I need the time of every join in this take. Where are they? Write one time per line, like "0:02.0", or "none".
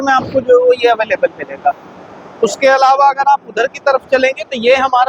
none